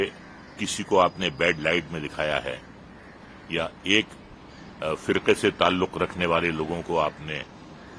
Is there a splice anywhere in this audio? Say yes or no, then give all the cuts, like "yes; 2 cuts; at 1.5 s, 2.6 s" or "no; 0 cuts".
no; 0 cuts